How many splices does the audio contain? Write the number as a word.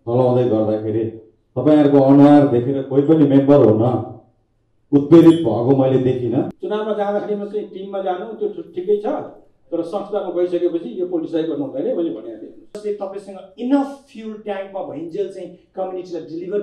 two